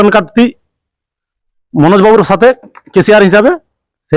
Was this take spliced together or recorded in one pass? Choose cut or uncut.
uncut